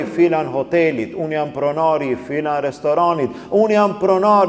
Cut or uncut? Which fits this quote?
uncut